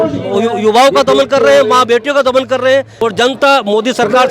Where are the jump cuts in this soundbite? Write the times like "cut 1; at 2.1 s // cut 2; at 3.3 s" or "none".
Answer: cut 1; at 2.9 s